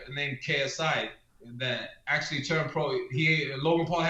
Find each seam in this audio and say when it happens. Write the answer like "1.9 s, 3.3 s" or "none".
none